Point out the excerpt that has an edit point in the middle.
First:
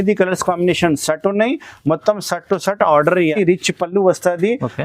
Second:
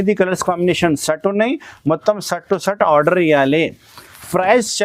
first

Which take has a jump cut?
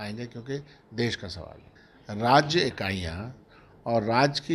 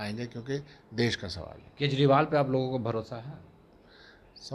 first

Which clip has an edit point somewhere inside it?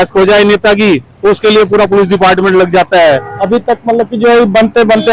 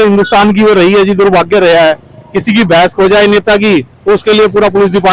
first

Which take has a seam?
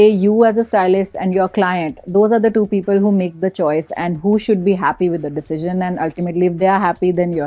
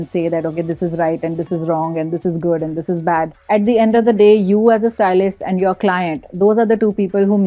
second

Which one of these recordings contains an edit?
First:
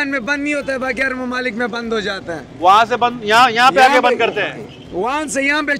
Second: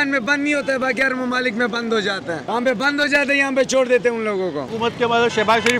second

